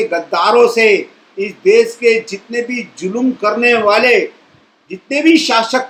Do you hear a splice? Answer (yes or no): no